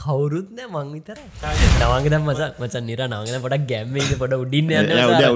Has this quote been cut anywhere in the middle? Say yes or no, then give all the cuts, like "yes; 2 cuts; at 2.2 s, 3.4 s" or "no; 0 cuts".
yes; 1 cut; at 1.4 s